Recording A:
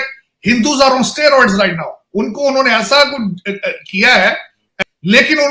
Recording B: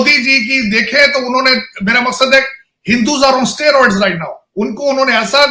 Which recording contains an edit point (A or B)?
A